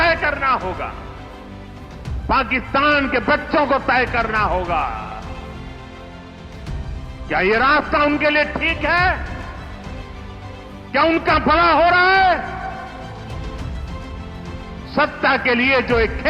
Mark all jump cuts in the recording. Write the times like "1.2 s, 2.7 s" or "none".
0.9 s, 2.3 s, 5.1 s, 7.3 s, 9.2 s, 10.9 s